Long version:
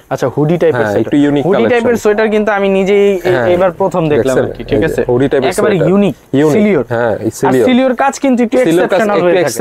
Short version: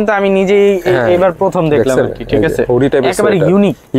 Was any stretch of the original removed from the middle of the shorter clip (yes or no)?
no